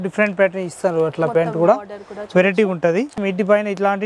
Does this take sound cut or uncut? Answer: cut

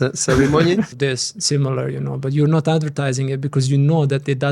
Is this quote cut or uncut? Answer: cut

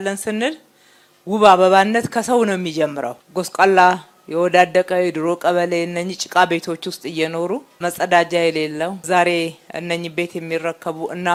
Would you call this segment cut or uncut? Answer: uncut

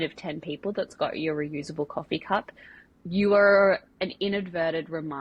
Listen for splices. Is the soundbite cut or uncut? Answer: uncut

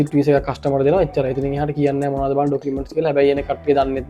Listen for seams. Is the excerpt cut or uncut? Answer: uncut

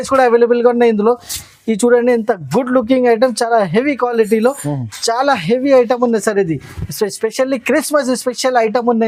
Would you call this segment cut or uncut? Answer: uncut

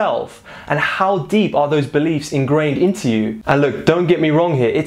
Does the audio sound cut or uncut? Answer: uncut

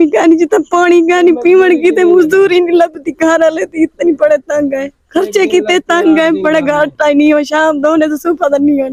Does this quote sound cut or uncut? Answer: uncut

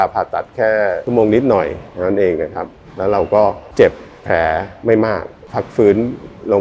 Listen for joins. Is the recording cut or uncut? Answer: cut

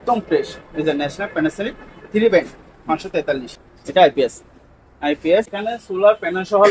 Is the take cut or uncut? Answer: cut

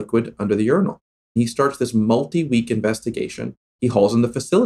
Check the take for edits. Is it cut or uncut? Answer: cut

